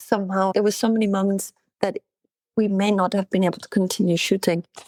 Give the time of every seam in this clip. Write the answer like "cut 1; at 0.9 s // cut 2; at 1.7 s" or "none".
none